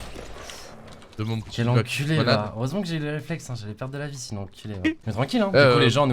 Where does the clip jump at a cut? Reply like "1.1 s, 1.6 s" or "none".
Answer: 5.1 s